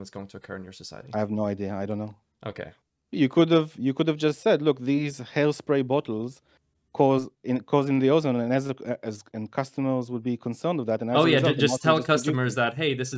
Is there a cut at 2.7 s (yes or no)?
yes